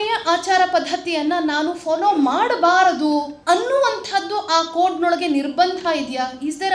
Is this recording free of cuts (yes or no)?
yes